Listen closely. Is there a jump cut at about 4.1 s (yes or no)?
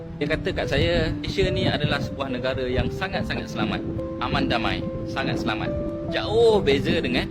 no